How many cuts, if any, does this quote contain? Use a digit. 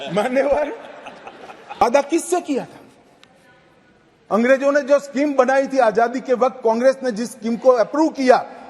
1